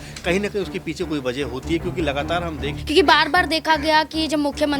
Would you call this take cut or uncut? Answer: cut